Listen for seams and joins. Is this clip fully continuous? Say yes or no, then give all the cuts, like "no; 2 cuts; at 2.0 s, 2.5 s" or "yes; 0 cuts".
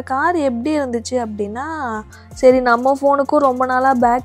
no; 1 cut; at 2.2 s